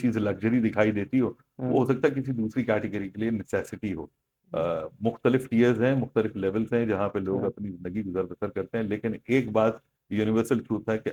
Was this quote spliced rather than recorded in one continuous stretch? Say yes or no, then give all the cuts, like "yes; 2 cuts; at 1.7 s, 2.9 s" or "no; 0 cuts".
no; 0 cuts